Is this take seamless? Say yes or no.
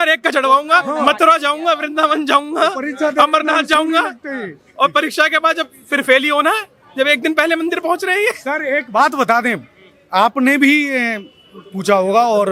yes